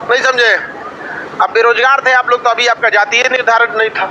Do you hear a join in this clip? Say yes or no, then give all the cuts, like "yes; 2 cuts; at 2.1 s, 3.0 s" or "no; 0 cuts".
no; 0 cuts